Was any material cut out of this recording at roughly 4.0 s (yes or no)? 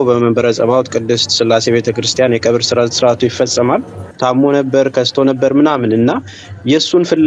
yes